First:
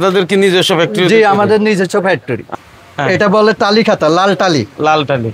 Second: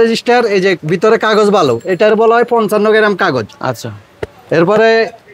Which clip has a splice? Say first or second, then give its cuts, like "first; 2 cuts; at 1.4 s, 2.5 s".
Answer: first; 1 cut; at 2.5 s